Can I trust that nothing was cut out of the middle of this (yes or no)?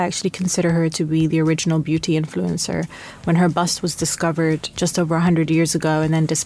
no